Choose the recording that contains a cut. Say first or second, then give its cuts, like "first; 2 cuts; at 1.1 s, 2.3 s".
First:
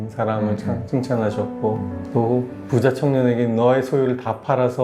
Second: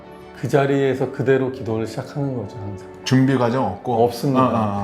second; 1 cut; at 2.9 s